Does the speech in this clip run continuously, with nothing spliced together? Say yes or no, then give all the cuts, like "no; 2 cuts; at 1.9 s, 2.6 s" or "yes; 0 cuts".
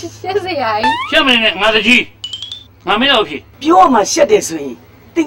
no; 1 cut; at 3.5 s